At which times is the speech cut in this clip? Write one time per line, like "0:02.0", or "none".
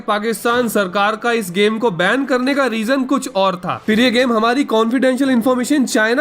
0:03.8